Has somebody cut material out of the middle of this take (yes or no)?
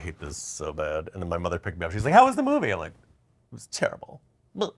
no